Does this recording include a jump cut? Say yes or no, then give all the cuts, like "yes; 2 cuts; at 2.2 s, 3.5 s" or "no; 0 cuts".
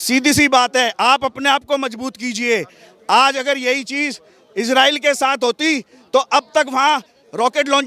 no; 0 cuts